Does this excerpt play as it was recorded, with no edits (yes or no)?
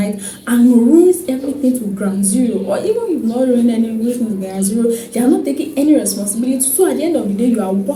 yes